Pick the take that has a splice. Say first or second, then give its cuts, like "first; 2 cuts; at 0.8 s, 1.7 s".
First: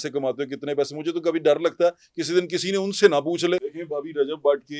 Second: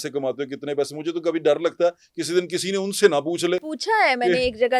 first; 1 cut; at 3.7 s